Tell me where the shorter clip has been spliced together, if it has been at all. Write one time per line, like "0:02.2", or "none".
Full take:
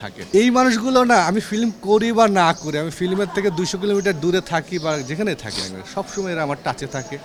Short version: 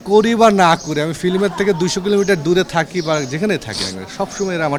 none

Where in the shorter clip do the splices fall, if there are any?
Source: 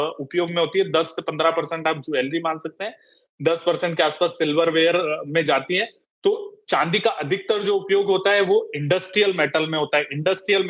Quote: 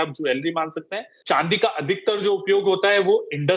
0:01.1

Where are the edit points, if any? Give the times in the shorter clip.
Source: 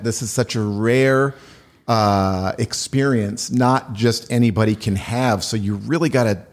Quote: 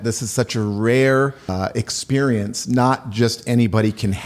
0:01.5

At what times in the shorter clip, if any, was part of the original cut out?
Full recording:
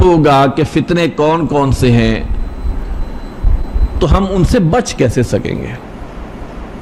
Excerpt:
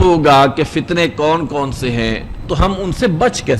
0:02.3

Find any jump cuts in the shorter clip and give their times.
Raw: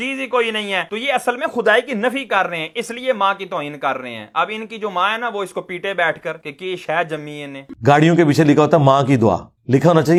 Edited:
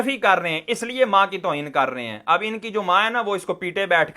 none

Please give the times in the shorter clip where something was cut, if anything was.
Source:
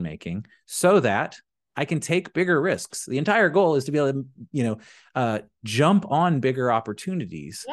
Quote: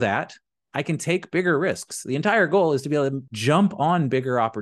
0:03.3

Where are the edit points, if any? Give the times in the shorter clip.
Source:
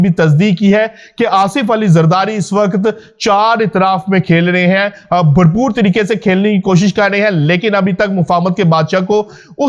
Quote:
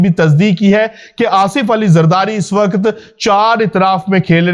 none

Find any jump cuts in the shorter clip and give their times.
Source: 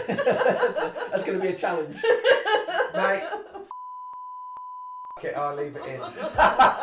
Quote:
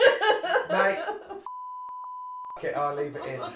0:02.0

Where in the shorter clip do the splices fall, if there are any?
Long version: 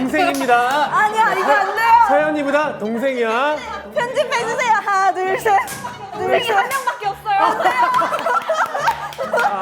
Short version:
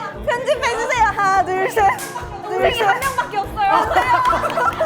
none

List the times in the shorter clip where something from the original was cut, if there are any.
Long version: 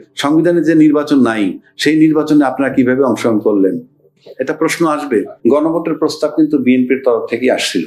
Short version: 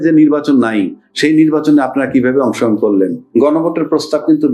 0:03.2

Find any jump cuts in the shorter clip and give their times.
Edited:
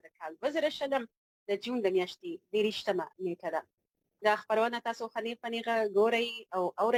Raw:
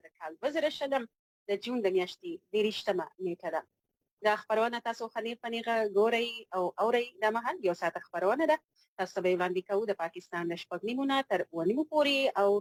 none

